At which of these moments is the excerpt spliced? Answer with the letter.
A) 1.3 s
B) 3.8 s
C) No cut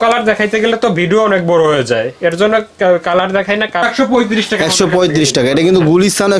B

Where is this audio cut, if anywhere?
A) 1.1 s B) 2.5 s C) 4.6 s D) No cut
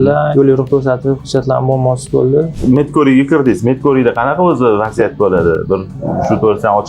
B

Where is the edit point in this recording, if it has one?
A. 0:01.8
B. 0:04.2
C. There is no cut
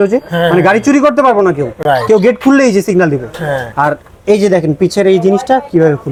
C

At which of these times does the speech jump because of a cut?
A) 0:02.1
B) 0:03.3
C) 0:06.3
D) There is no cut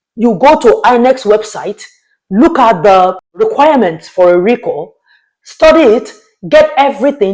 B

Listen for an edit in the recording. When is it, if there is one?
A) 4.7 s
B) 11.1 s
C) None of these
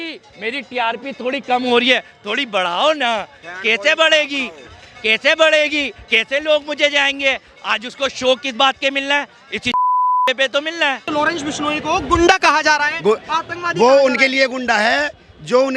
B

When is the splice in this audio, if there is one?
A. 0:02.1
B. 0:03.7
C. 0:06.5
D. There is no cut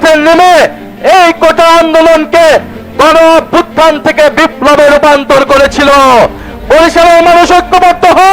C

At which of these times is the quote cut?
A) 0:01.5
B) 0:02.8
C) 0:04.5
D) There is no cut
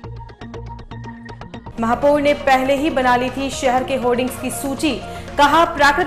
A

